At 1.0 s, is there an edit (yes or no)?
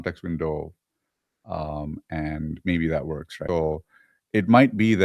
no